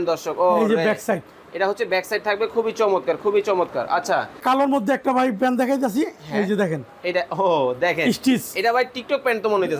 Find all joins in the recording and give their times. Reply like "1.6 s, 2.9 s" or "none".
4.4 s